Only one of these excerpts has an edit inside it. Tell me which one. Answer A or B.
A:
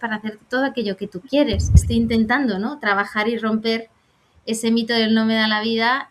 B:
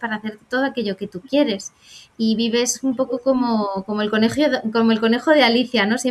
A